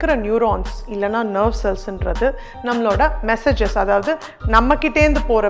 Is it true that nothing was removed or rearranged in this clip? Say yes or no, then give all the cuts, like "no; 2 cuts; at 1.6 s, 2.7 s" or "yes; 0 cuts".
yes; 0 cuts